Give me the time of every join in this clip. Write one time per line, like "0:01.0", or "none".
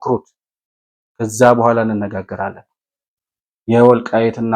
none

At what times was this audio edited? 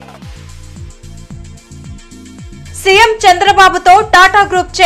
0:01.4

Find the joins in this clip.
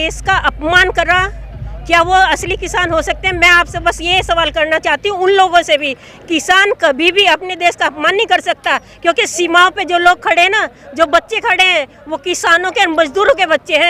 none

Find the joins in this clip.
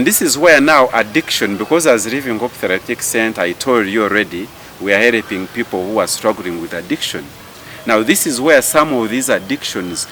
none

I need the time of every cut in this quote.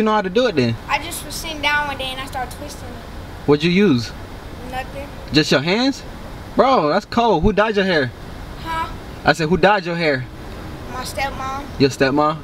none

